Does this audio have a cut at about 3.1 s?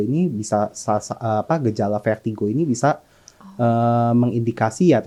no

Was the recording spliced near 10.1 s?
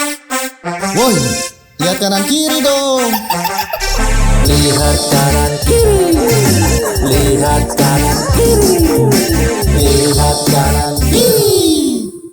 no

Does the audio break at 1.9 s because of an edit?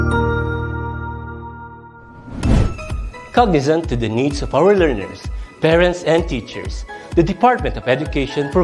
yes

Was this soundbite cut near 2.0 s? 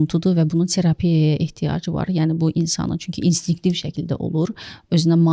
no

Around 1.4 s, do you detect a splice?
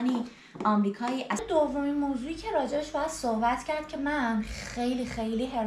yes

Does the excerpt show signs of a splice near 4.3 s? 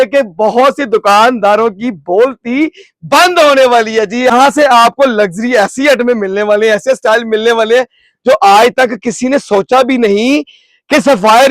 yes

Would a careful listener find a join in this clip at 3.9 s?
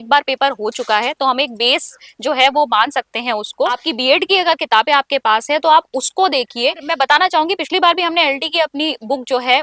yes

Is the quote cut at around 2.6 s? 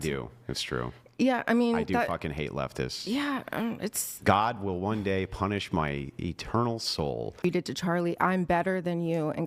no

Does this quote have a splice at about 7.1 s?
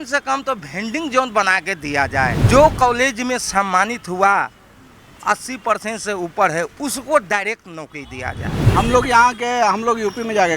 no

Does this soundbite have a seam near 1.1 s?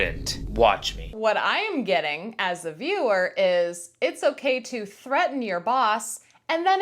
yes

